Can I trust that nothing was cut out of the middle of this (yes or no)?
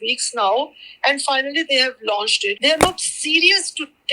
no